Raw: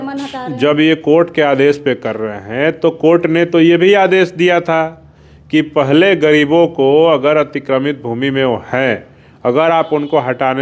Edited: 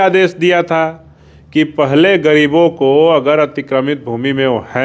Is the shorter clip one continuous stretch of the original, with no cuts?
yes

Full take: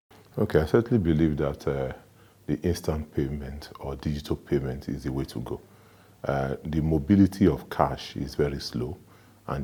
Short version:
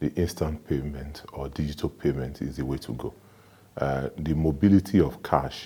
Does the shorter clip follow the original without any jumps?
yes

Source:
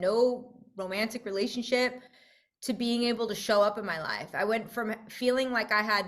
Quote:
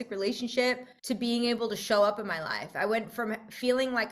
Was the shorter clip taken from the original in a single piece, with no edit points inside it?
no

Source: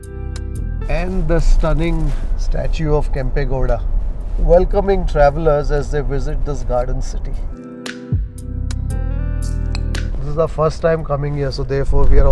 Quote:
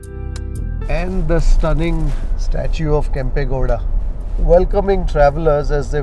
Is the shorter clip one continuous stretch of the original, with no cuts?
yes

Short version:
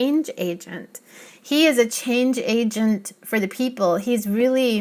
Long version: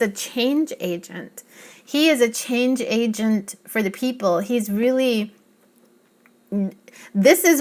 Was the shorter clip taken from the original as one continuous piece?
yes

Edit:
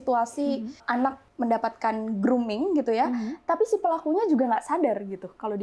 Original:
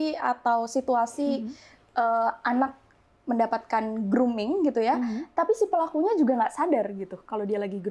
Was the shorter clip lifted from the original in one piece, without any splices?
no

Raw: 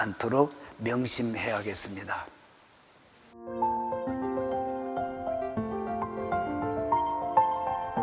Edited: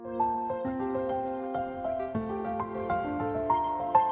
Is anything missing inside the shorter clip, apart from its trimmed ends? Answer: no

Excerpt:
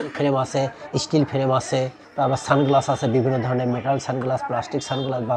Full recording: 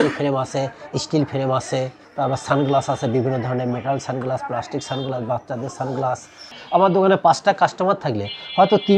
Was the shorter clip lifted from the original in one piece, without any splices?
yes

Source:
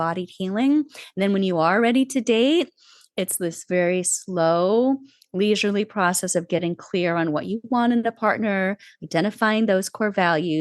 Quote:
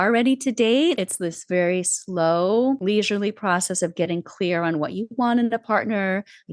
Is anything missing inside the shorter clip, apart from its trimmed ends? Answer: yes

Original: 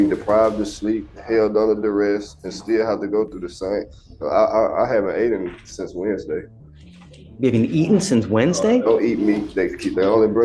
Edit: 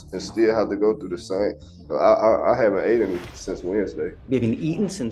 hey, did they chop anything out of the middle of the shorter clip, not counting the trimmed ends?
yes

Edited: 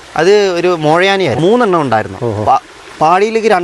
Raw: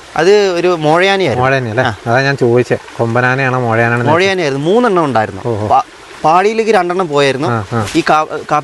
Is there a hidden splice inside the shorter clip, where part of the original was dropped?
yes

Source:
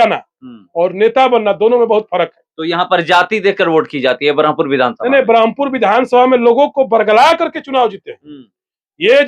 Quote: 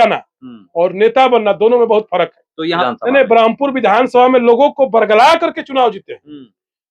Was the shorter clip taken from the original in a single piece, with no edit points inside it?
no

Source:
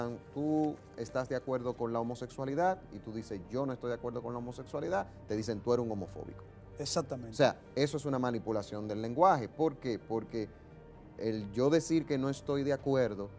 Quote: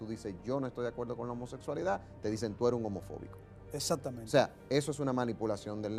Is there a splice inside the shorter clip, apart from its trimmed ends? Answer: no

